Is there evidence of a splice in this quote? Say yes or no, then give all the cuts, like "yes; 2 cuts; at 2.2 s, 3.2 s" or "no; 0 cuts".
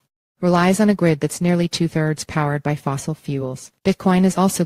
yes; 1 cut; at 3.7 s